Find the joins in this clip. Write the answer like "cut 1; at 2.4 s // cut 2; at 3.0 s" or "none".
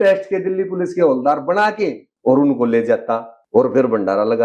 cut 1; at 2.1 s // cut 2; at 3.3 s